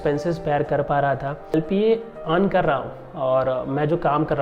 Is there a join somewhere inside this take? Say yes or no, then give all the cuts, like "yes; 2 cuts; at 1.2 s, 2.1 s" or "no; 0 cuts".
yes; 1 cut; at 1.5 s